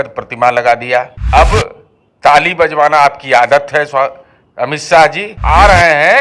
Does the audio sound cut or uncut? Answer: cut